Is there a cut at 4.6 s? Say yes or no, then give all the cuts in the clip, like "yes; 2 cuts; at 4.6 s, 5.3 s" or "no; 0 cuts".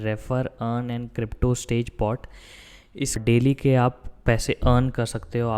no; 1 cut; at 3.2 s